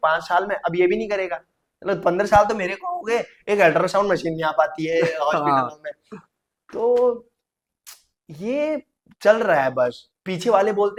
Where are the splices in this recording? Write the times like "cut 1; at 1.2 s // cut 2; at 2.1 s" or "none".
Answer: none